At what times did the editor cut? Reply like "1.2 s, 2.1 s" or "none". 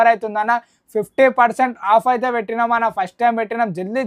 none